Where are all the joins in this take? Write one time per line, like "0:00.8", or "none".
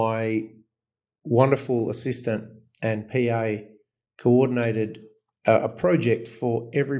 none